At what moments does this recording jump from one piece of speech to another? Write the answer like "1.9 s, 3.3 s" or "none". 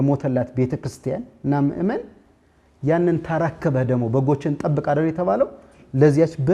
none